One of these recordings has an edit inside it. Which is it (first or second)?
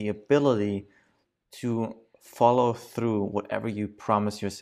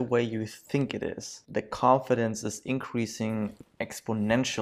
second